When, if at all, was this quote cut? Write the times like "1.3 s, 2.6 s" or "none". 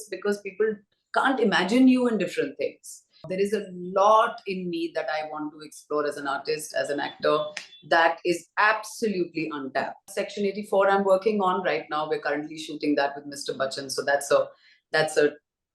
3.3 s, 10.2 s